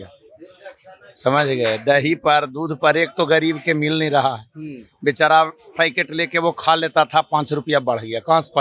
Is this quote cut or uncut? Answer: uncut